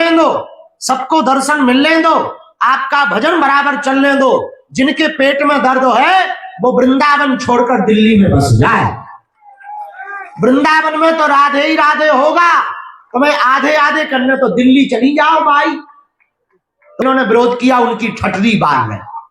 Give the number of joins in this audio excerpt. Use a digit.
1